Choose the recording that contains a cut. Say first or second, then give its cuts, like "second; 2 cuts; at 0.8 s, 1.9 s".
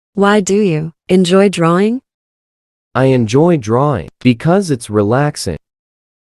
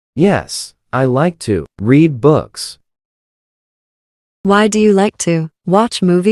first; 1 cut; at 0.9 s